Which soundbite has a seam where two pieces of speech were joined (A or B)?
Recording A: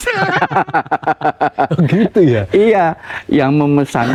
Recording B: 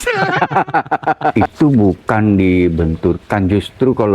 B